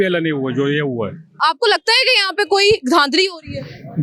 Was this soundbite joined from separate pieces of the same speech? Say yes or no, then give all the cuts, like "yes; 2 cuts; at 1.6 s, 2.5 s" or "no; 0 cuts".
yes; 1 cut; at 1.4 s